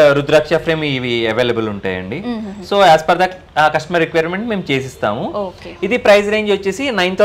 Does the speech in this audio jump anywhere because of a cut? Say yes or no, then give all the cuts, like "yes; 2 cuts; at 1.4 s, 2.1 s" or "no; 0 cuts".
no; 0 cuts